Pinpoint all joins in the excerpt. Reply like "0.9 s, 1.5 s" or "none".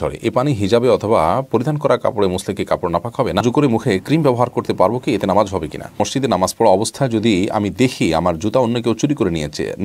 3.4 s, 6.0 s